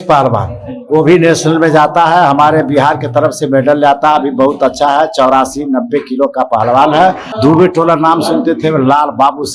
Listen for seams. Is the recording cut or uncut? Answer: cut